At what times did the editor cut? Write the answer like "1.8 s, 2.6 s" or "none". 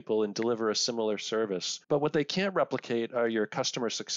1.7 s